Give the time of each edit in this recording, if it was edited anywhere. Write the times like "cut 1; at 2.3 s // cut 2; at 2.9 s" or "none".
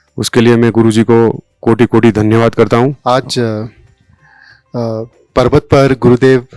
cut 1; at 3.0 s